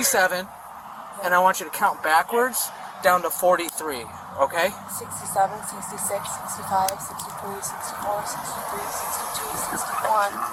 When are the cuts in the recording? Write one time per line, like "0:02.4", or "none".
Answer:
none